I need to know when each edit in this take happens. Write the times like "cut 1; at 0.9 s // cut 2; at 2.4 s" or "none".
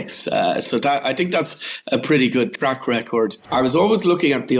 cut 1; at 3.4 s